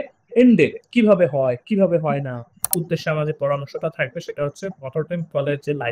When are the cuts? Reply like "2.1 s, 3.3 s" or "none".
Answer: 2.7 s